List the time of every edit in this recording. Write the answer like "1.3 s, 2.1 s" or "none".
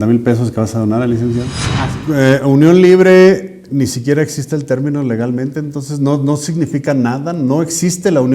1.6 s

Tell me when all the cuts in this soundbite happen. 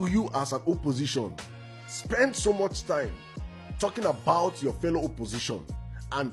none

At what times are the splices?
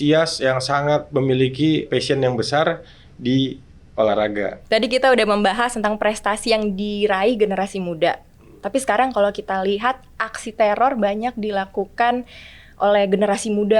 1.1 s, 1.9 s, 4.6 s

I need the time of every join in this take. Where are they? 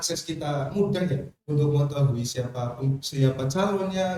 none

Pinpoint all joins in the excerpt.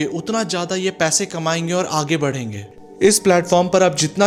none

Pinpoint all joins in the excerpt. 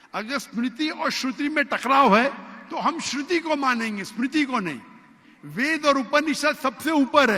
none

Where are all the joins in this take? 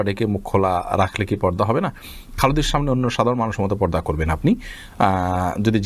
none

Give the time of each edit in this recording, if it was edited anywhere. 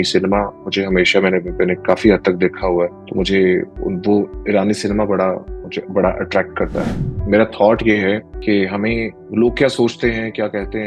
3.0 s, 6.9 s, 8.3 s, 9.2 s

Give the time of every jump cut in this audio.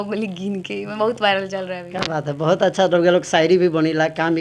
none

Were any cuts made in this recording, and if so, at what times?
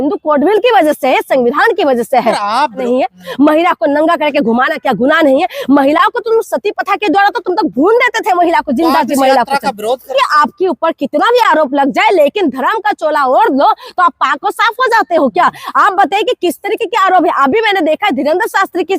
2.8 s, 10.1 s

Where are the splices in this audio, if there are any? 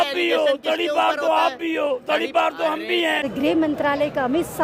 3.3 s

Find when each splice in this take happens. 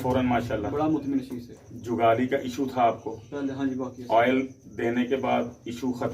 none

